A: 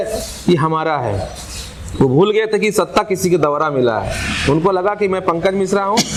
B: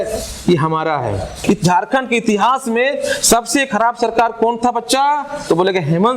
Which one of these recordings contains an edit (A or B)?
B